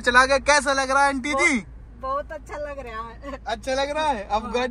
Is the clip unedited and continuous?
yes; 0 cuts

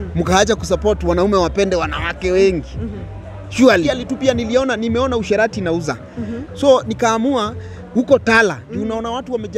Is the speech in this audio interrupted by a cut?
yes; 1 cut; at 3.9 s

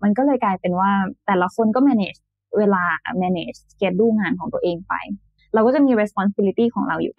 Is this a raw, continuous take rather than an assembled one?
no; 1 cut; at 5.3 s

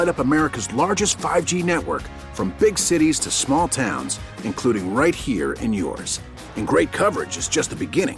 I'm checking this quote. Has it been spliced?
no; 0 cuts

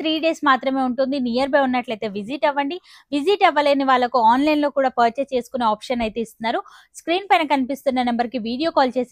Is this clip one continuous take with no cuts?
yes; 0 cuts

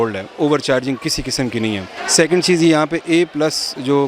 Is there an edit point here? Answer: yes; 1 cut; at 1.9 s

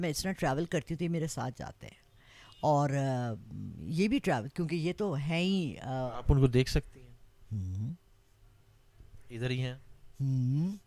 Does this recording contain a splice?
no; 0 cuts

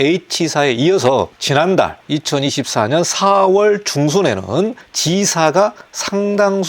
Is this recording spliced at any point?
yes; 1 cut; at 1.4 s

